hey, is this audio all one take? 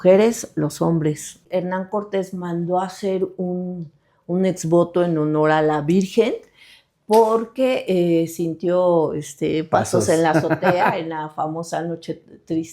no; 1 cut; at 1.4 s

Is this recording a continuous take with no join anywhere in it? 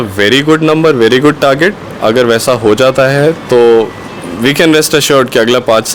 yes; 0 cuts

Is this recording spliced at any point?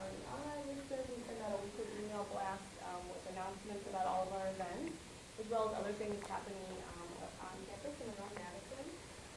yes; 1 cut; at 3.6 s

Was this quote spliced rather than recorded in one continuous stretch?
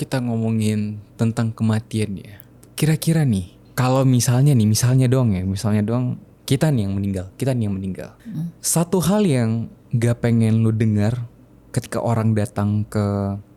no; 0 cuts

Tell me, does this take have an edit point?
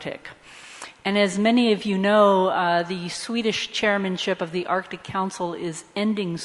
yes; 1 cut; at 1.3 s

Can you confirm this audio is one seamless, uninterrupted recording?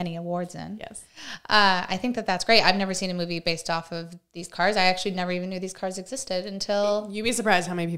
yes; 0 cuts

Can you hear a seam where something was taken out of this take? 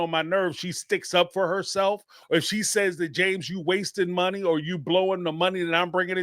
yes; 1 cut; at 2.1 s

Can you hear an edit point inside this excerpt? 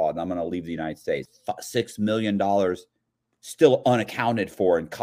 yes; 1 cut; at 1.3 s

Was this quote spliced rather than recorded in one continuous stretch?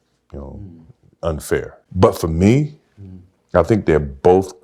yes; 1 cut; at 1.8 s

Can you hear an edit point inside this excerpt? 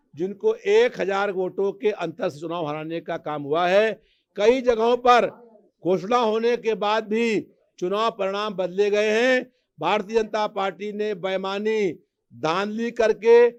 no; 0 cuts

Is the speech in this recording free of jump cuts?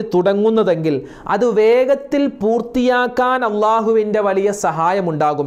yes; 0 cuts

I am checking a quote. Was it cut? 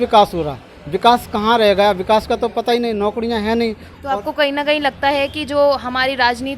no; 0 cuts

